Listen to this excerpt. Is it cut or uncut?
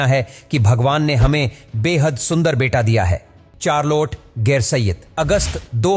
cut